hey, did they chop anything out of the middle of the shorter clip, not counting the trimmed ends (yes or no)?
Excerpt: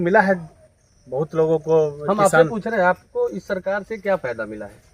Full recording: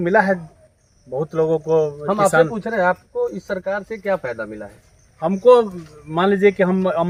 no